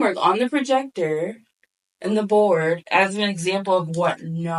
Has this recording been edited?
no; 0 cuts

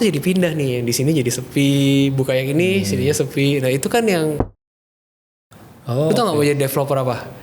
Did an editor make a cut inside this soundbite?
yes; 1 cut; at 5.0 s

